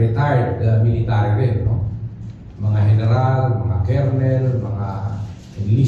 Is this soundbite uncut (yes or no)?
yes